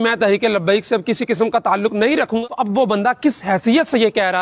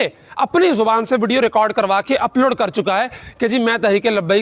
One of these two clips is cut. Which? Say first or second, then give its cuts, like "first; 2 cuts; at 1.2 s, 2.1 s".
first; 1 cut; at 2.4 s